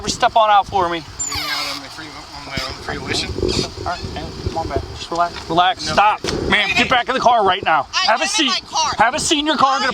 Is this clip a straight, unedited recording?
no; 2 cuts; at 1.2 s, 6.3 s

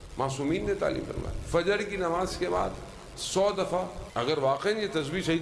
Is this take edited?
yes; 1 cut; at 4.0 s

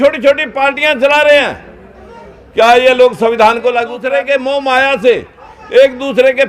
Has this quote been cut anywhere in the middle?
yes; 1 cut; at 4.0 s

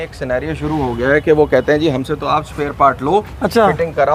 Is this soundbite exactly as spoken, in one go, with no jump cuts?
yes; 0 cuts

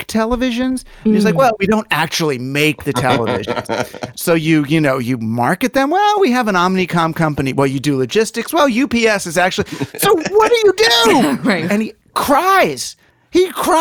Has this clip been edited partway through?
yes; 2 cuts; at 4.1 s, 11.7 s

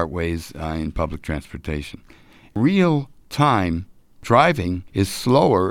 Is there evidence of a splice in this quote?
yes; 3 cuts; at 2.5 s, 4.2 s, 4.8 s

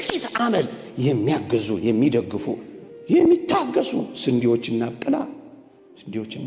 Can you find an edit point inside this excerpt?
no; 0 cuts

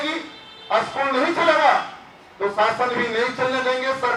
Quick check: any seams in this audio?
no; 0 cuts

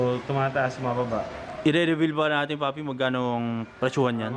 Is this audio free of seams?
no; 1 cut; at 1.4 s

